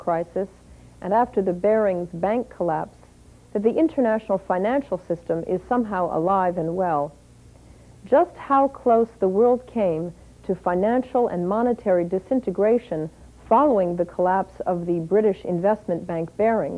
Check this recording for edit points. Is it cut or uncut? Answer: uncut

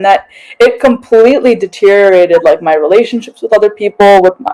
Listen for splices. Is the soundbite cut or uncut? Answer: uncut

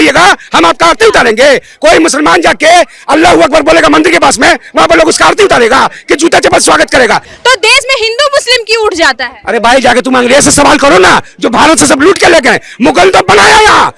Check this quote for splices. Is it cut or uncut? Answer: cut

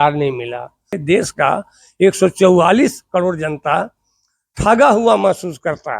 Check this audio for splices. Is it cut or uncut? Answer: cut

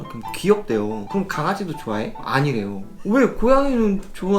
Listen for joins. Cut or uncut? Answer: cut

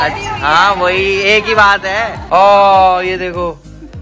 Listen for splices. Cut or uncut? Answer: cut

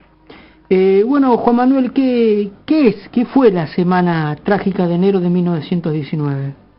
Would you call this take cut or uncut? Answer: cut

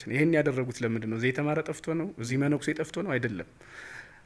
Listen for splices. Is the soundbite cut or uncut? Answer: uncut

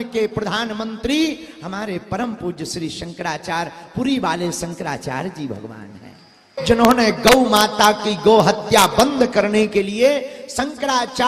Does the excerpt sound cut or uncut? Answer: cut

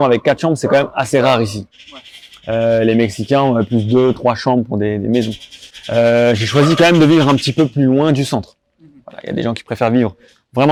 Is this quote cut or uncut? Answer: uncut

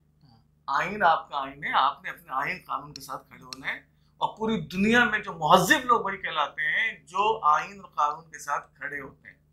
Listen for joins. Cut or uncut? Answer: uncut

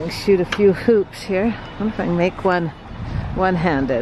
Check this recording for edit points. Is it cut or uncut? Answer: uncut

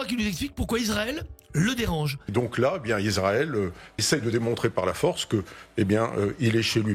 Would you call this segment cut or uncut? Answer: cut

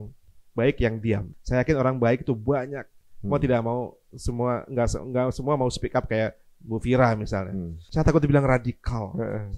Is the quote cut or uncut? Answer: cut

